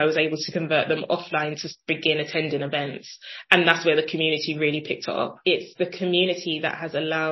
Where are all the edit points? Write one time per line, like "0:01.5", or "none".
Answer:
0:05.4